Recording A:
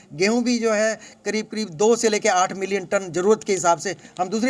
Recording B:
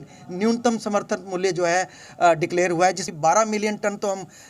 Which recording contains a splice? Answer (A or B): B